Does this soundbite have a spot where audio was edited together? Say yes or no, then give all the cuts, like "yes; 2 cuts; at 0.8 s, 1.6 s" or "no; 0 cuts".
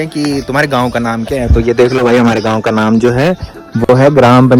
no; 0 cuts